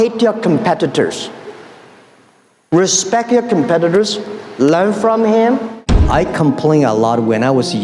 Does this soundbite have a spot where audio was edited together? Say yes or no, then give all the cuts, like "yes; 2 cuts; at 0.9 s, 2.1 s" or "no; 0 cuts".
yes; 1 cut; at 5.9 s